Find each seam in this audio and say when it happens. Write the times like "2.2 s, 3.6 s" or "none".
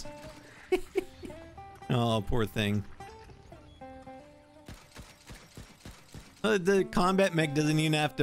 none